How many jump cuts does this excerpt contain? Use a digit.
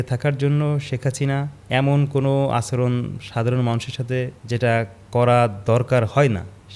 2